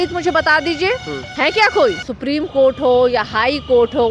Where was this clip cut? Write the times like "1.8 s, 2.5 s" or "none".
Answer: 1.2 s, 2.1 s